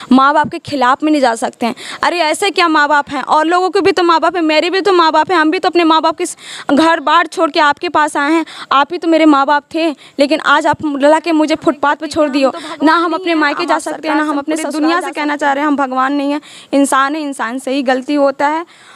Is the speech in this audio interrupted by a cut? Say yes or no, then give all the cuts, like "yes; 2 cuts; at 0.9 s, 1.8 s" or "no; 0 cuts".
yes; 1 cut; at 14.7 s